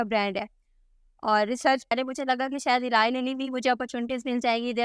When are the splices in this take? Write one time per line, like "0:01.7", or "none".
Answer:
0:01.9